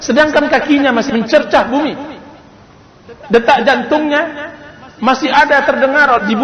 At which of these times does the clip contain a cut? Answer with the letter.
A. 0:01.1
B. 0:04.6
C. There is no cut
A